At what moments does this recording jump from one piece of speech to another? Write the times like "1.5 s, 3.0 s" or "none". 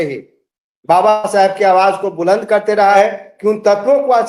3.0 s